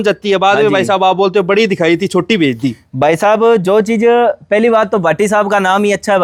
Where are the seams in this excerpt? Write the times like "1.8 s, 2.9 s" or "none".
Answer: none